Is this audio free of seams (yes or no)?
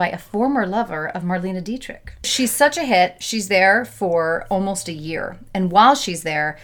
no